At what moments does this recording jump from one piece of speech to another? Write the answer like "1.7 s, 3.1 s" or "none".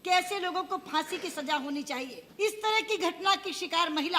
2.2 s